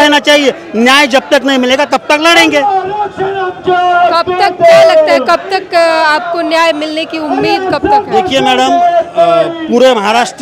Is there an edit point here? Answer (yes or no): no